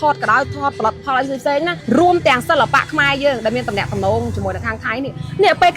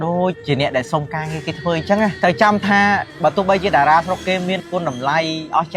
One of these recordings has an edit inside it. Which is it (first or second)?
second